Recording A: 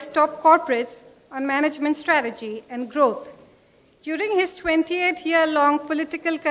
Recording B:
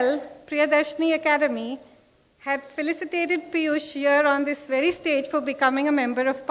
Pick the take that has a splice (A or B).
B